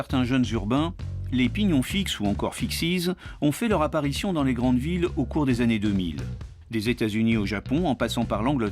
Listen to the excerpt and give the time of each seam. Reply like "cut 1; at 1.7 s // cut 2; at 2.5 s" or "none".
cut 1; at 4.9 s